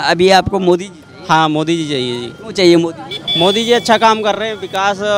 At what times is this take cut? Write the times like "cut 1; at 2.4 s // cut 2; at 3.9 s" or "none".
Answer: none